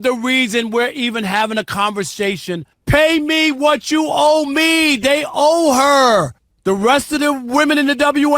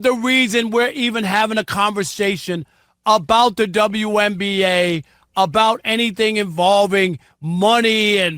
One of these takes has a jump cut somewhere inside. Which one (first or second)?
first